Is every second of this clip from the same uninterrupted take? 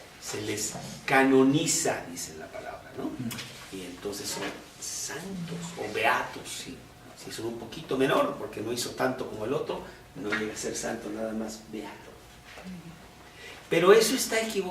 no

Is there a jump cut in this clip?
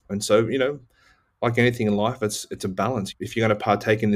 no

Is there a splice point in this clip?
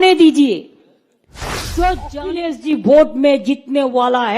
yes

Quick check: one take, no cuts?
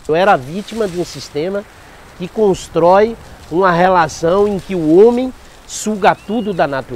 yes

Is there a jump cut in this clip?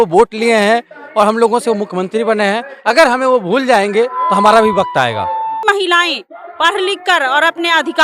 yes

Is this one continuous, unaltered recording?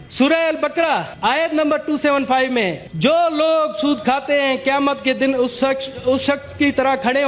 no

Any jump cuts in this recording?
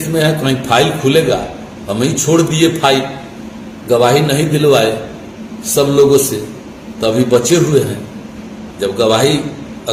no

